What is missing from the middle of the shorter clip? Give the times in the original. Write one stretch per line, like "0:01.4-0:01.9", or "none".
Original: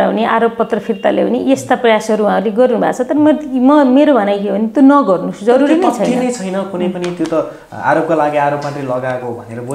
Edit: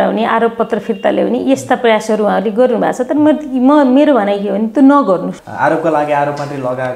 0:05.3-0:07.6